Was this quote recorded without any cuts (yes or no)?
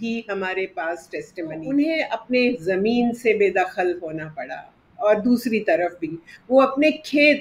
no